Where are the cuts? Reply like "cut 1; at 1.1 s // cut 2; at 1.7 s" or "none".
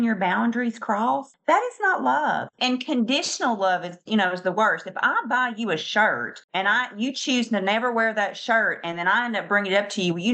cut 1; at 2.5 s // cut 2; at 6.3 s